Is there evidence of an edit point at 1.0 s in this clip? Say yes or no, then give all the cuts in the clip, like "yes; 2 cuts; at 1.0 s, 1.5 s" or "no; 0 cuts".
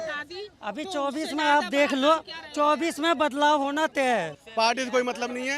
no; 1 cut; at 4.3 s